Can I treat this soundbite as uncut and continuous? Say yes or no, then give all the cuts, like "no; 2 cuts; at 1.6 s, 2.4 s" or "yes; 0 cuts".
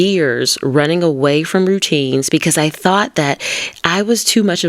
yes; 0 cuts